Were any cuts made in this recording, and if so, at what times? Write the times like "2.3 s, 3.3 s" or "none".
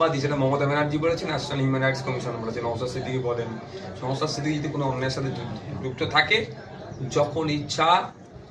none